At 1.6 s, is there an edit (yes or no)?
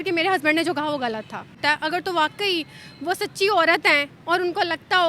yes